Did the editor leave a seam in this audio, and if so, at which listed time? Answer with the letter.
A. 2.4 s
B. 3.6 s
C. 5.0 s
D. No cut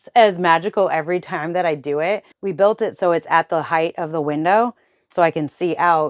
A